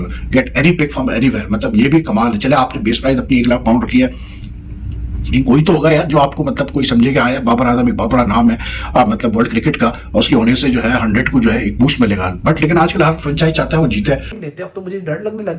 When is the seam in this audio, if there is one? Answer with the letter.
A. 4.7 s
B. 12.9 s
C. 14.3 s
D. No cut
C